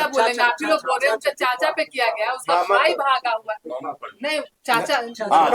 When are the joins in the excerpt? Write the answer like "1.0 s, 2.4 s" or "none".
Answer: none